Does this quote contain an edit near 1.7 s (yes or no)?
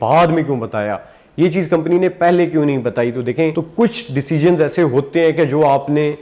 no